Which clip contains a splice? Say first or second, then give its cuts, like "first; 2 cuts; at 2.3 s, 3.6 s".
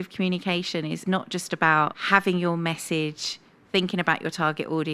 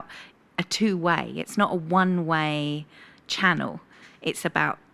first; 2 cuts; at 1.0 s, 2.0 s